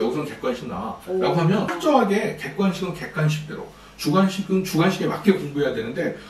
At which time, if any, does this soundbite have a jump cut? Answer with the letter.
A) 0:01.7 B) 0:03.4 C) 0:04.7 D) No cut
A